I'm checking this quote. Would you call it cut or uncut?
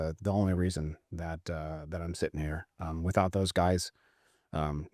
uncut